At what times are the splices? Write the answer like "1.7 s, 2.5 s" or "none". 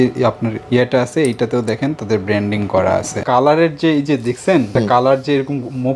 3.2 s